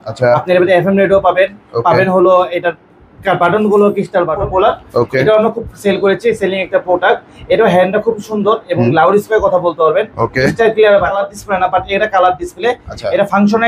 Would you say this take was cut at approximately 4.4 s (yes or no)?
yes